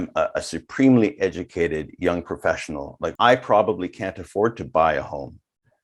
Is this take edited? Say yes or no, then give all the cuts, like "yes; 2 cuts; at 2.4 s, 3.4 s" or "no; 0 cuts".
yes; 1 cut; at 3.1 s